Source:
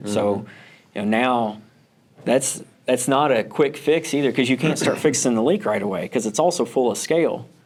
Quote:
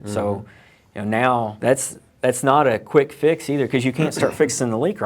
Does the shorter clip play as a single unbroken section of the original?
no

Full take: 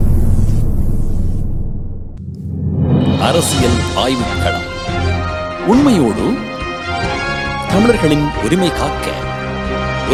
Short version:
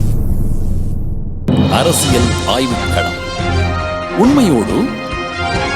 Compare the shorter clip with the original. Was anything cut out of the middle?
yes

